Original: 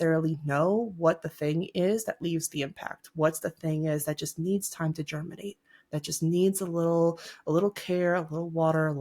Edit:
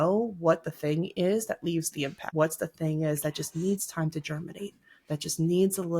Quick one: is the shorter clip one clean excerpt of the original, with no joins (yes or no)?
no